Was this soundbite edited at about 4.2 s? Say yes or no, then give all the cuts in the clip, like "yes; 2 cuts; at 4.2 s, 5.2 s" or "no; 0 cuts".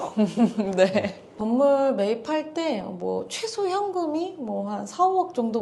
no; 1 cut; at 1.3 s